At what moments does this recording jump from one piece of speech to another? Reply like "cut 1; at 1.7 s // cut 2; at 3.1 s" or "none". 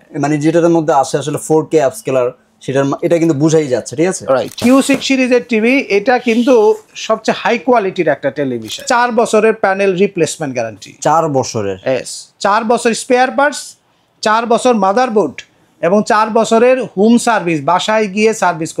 cut 1; at 4.5 s // cut 2; at 8.9 s